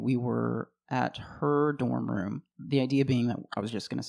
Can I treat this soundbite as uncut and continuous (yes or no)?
no